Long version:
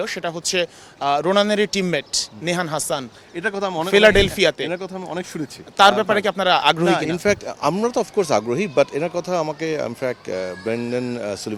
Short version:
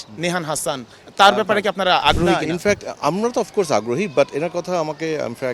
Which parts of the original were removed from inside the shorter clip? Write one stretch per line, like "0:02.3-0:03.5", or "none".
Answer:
0:03.2-0:05.6